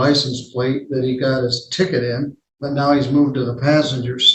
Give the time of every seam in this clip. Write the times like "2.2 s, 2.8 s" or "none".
2.4 s